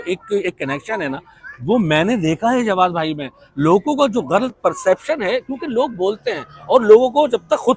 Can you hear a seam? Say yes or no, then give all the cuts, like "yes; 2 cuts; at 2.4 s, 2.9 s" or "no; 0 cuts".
no; 0 cuts